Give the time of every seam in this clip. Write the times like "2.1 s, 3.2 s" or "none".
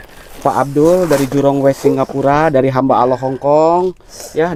none